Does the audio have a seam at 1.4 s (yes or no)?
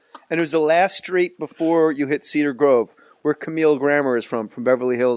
yes